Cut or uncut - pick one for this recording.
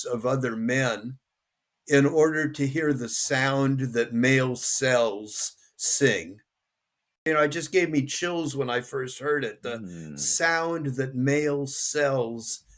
cut